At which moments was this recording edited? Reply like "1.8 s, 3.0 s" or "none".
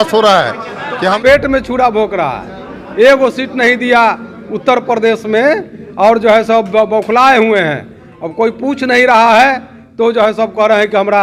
1.2 s